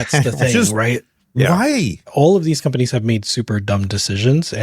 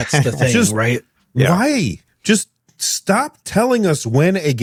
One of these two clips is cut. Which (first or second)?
first